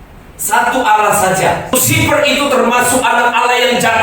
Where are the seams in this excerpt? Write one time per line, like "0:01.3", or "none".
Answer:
0:01.7